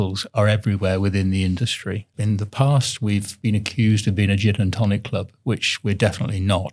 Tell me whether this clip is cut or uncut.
cut